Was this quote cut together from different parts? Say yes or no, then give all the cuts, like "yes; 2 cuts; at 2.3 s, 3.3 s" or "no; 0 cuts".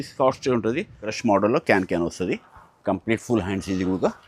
yes; 1 cut; at 1.1 s